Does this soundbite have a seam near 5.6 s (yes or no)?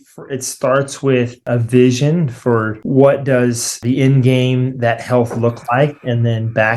no